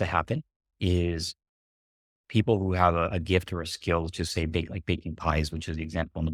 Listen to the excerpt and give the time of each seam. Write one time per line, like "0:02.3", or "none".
none

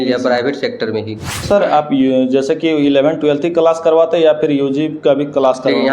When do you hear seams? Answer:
0:01.4

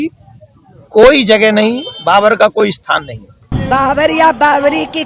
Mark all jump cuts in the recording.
0:03.5

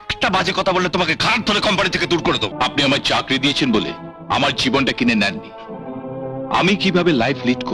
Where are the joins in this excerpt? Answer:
0:02.5

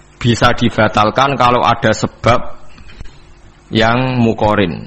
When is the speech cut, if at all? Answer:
none

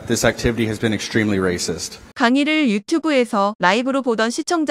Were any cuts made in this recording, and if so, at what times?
none

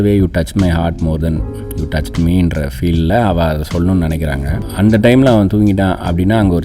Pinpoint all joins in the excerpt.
0:04.6

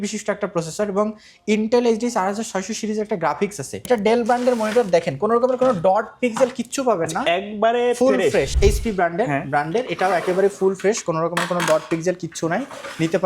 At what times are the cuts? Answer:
0:03.8
0:08.5

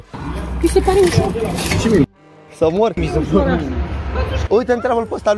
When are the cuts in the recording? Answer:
none

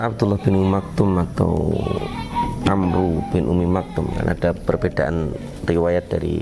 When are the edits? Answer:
none

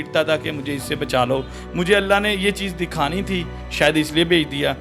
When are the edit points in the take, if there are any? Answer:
0:01.5

